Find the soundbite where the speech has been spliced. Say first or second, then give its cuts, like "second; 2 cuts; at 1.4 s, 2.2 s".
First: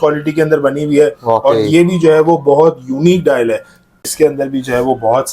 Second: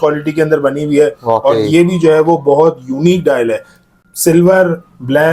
first; 1 cut; at 4.0 s